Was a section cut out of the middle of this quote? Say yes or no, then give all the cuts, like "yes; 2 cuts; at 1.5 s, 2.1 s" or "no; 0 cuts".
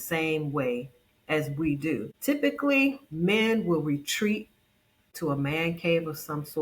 yes; 1 cut; at 2.1 s